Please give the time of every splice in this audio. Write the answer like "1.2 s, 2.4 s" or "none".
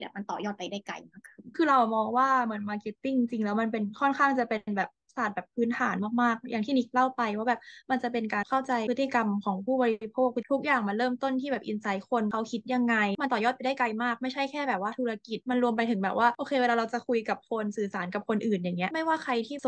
none